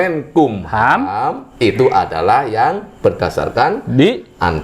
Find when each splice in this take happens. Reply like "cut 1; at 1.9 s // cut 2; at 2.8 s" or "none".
none